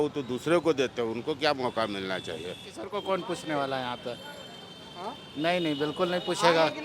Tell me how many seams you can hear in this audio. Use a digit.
1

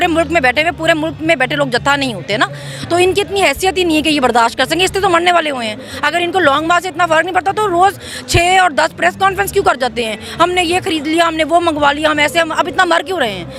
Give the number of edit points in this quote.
0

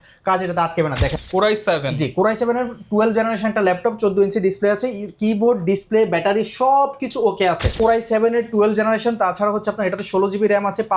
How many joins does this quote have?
2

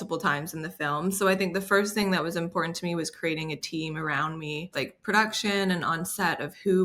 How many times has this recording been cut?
1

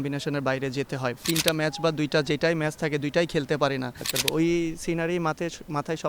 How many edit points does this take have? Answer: 2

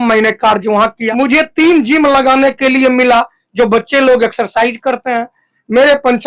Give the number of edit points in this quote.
1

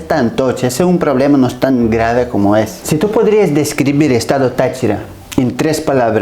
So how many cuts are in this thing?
1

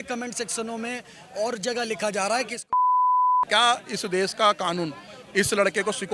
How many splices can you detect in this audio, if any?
1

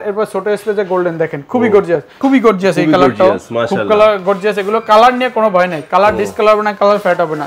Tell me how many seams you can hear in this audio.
1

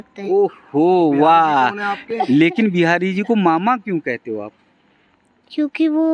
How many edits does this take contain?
1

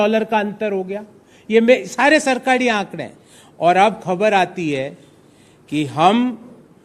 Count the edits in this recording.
0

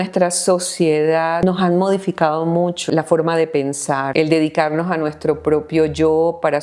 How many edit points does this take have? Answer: 3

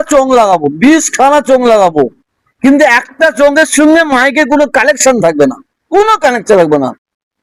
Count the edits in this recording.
0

